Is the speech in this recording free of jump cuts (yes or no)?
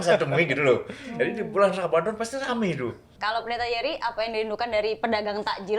no